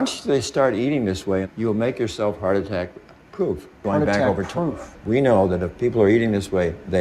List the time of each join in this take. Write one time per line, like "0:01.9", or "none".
none